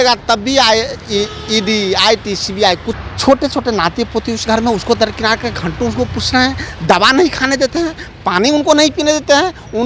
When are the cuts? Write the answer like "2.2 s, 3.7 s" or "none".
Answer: 3.0 s

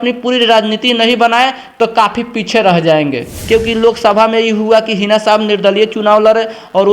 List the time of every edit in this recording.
3.3 s

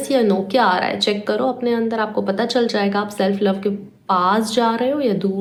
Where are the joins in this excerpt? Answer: none

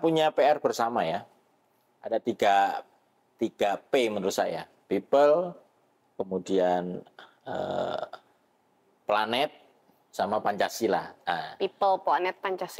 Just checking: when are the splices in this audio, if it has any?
none

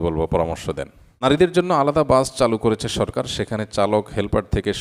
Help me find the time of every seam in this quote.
1.0 s

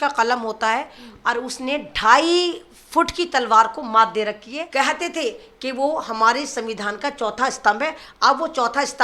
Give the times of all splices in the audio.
4.5 s

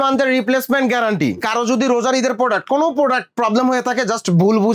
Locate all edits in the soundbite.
1.4 s

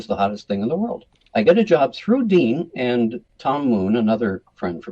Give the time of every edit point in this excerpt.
1.2 s, 3.2 s

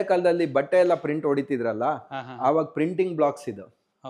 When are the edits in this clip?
none

